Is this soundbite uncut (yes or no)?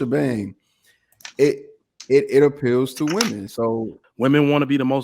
no